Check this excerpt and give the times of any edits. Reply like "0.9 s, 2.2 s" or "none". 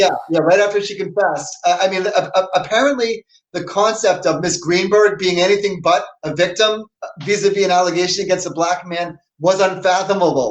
none